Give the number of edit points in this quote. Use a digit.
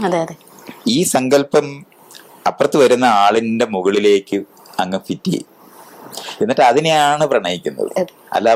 0